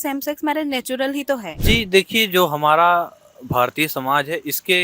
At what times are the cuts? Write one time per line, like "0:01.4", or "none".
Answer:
0:01.5